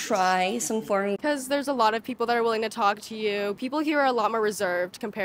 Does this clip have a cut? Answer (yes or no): yes